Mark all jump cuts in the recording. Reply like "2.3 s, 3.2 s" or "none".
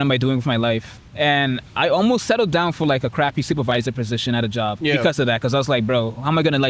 1.1 s, 4.8 s

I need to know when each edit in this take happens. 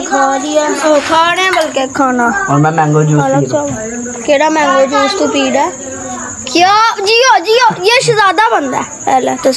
none

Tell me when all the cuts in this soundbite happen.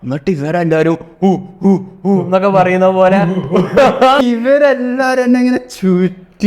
4.2 s

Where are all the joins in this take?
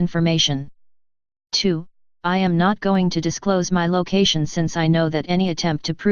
4.5 s

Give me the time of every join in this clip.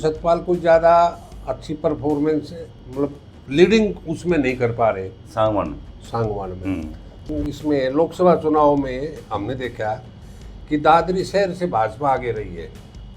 7.3 s

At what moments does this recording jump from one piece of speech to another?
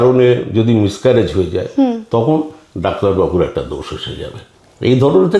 none

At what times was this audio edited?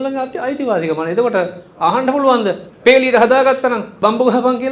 2.7 s, 3.9 s

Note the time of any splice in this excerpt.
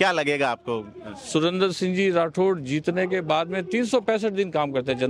none

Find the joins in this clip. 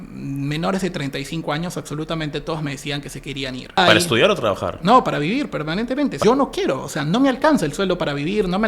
3.8 s, 6.2 s

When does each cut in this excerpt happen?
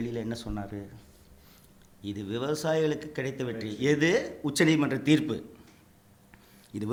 none

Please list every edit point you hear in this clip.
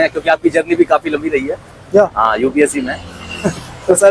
none

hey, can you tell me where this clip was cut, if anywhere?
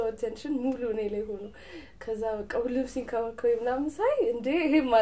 none

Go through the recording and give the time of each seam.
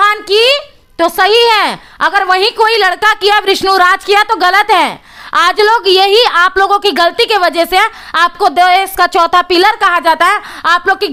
none

